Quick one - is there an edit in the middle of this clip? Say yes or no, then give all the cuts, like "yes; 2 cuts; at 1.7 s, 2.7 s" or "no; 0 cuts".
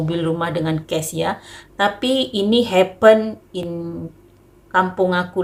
no; 0 cuts